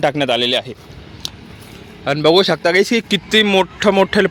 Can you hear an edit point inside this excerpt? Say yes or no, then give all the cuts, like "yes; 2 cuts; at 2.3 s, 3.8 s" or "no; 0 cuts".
no; 0 cuts